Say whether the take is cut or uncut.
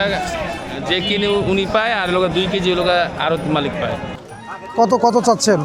cut